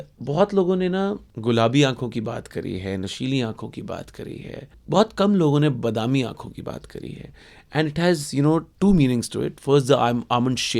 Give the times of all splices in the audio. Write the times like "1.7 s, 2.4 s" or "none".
1.3 s